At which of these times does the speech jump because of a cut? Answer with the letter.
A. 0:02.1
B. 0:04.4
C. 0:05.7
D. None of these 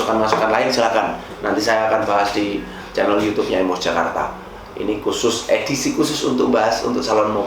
D